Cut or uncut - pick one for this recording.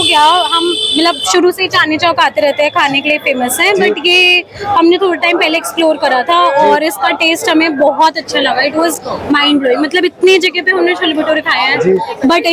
uncut